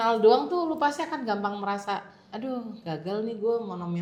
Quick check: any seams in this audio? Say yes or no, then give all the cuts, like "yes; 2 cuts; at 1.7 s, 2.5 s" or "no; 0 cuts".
no; 0 cuts